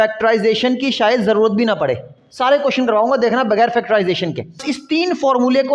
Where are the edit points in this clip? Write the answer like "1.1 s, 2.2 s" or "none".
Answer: 4.6 s